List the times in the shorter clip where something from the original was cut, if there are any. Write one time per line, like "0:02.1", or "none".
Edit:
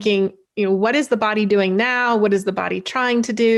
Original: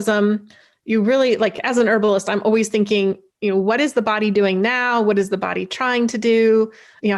none